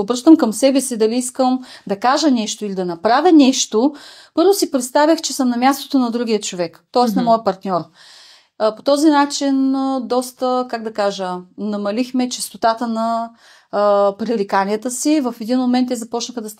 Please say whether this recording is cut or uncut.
uncut